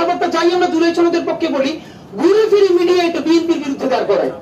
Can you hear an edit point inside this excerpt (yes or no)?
no